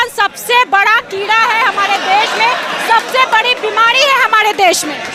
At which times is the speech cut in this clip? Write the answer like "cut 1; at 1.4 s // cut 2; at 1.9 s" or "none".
none